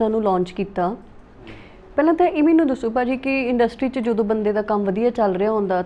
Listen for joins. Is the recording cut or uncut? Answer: uncut